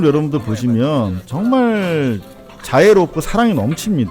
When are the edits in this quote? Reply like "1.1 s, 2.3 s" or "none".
none